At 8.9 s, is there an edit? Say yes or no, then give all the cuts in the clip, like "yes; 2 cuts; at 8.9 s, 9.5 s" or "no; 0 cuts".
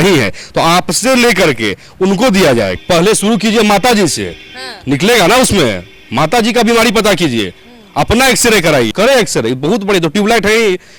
yes; 2 cuts; at 2.8 s, 8.9 s